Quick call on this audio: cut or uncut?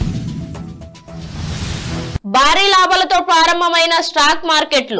cut